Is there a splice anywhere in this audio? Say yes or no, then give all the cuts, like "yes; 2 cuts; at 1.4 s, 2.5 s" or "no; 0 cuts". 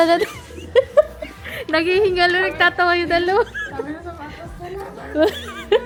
no; 0 cuts